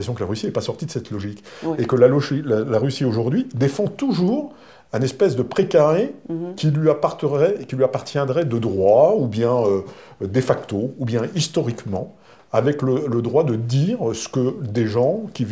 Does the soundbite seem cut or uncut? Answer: uncut